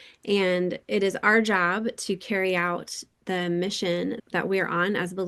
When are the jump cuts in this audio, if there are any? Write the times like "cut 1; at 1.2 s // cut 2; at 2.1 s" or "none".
cut 1; at 4.2 s

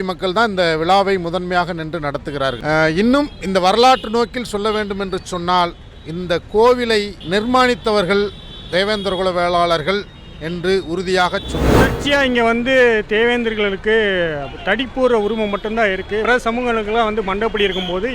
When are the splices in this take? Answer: cut 1; at 11.9 s

